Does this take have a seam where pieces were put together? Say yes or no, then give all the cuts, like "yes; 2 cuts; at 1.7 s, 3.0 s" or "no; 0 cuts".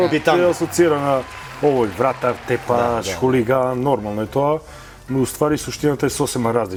no; 0 cuts